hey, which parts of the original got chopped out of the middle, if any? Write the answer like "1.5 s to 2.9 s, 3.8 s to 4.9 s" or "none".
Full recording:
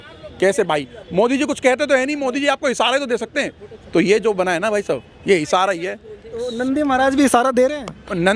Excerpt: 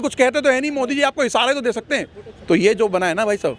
none